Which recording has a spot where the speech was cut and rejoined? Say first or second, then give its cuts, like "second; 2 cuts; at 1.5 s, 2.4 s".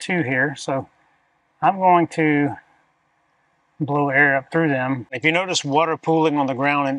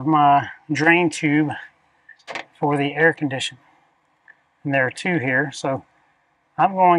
first; 1 cut; at 5.2 s